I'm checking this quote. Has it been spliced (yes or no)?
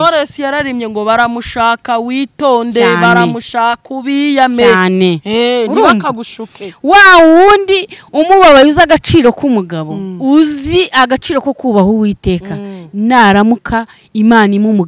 no